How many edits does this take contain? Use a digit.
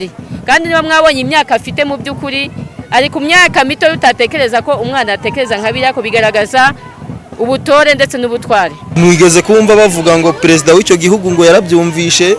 1